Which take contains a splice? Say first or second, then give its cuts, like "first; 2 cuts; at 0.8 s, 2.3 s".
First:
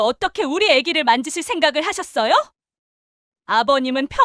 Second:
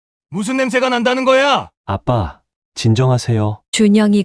second; 1 cut; at 1.7 s